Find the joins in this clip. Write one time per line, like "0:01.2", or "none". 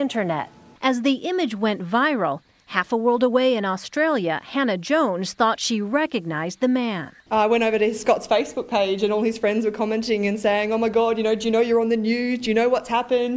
0:07.1